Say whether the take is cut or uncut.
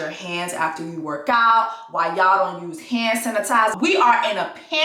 uncut